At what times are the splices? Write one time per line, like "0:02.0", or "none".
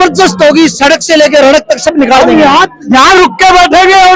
none

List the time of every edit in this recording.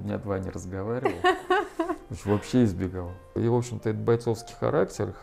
0:03.4

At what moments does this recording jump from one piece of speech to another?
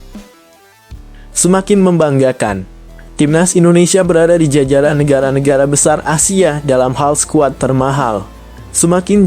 0:01.4

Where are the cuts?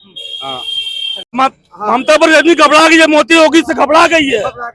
0:01.3

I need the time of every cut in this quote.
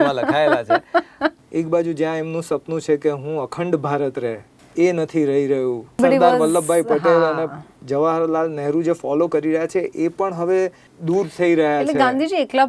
0:01.4
0:06.0

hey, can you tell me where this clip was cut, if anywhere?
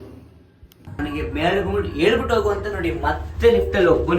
0:01.0

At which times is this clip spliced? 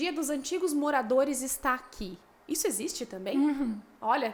none

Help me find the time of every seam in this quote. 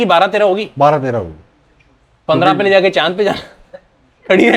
none

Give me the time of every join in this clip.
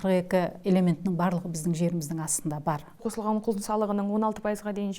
0:03.0

